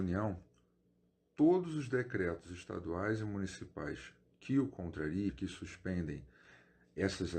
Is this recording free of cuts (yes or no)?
no